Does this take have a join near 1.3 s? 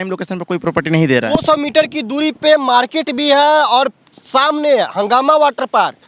yes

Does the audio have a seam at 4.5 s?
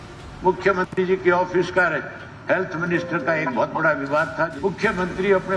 yes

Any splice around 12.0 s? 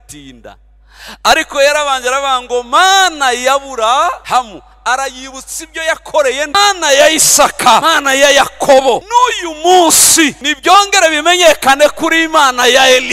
no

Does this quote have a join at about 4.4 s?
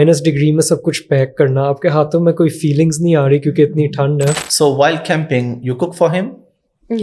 yes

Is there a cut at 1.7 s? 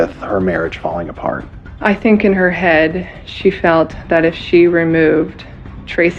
yes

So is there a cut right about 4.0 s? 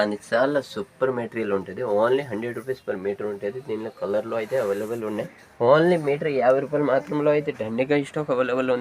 no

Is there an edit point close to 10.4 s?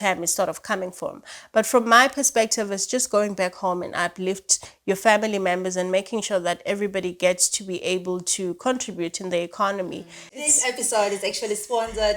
yes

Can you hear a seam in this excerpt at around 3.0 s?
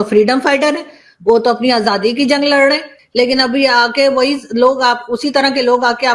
yes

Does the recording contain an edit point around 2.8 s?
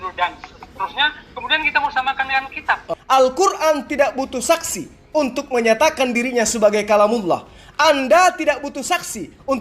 yes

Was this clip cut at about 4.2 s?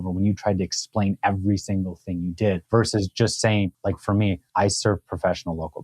yes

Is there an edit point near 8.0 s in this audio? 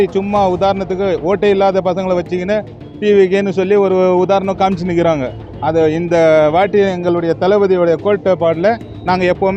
no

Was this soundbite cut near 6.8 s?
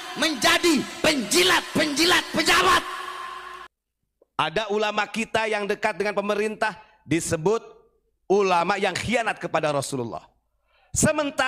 no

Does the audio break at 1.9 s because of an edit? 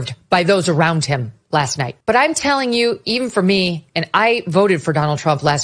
yes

